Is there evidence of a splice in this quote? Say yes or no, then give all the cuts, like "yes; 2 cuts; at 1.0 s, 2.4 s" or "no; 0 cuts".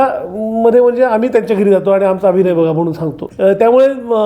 yes; 1 cut; at 3.2 s